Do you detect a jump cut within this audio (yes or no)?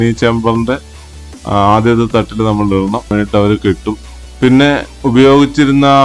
yes